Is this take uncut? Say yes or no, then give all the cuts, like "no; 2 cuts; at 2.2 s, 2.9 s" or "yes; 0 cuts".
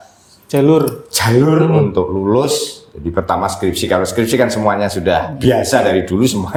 yes; 0 cuts